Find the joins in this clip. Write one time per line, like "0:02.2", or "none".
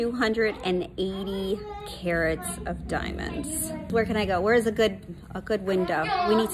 none